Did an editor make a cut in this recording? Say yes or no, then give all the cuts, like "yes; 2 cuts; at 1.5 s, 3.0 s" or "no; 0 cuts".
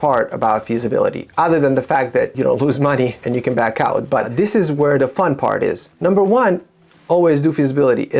yes; 4 cuts; at 2.3 s, 3.2 s, 4.3 s, 5.9 s